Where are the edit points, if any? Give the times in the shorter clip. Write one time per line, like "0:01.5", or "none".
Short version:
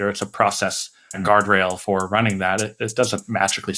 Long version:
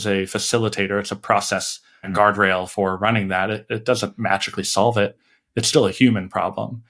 none

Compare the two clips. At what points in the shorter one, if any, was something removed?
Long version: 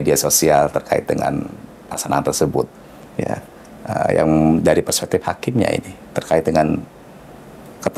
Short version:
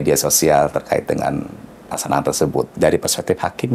0:02.8

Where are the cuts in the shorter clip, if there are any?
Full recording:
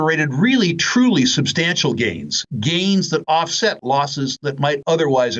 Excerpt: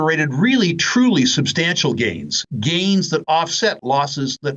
none

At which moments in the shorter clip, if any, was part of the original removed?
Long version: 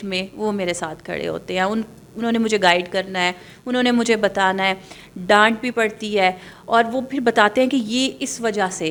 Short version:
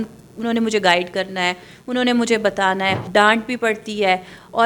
0:03.0

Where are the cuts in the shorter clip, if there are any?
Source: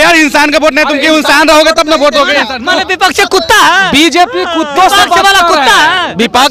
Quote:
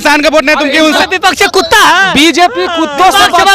0:01.0

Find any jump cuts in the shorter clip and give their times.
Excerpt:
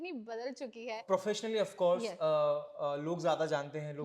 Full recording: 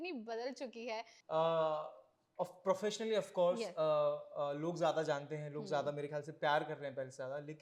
0:01.0

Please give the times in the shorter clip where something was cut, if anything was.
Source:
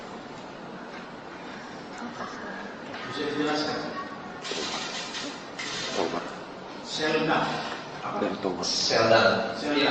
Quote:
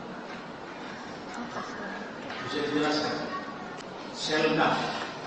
0:03.8

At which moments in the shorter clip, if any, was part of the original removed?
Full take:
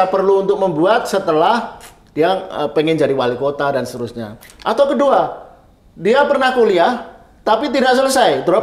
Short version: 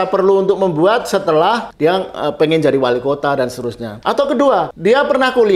0:01.7
0:03.8
0:04.7

